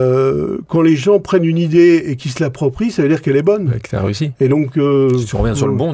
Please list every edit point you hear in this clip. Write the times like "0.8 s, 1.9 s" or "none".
none